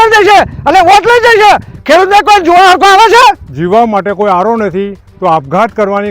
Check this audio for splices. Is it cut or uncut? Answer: cut